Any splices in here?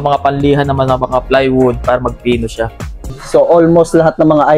yes; 1 cut; at 3.1 s

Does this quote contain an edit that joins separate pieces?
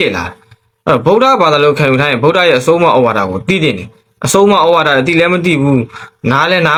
no; 0 cuts

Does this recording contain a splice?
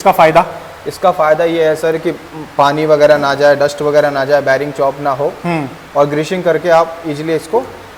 no; 0 cuts

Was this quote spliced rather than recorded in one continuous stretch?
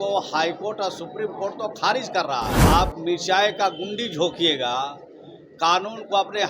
yes; 1 cut; at 2.6 s

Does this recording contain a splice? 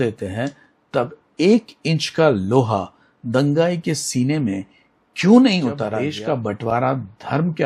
yes; 1 cut; at 6.0 s

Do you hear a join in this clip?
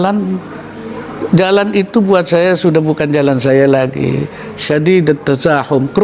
no; 0 cuts

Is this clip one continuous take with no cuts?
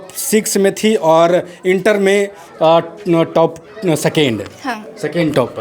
yes; 0 cuts

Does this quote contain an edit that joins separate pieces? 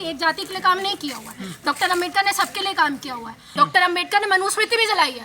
yes; 1 cut; at 3.4 s

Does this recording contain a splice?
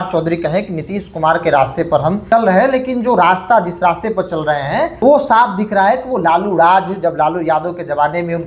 yes; 2 cuts; at 2.2 s, 4.9 s

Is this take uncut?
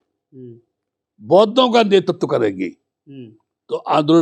yes; 0 cuts

